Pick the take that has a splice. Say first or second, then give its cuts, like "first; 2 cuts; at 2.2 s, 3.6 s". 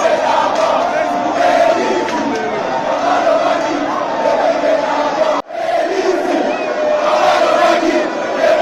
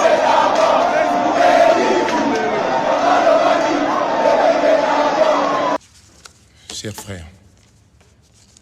second; 1 cut; at 5.3 s